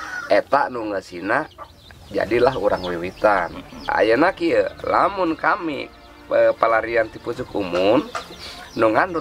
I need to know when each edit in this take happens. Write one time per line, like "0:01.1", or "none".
0:03.7